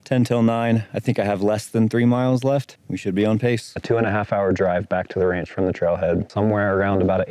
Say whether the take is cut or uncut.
cut